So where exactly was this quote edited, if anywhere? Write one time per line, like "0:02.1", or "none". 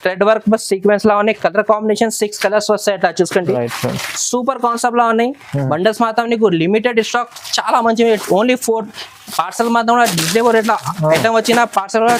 none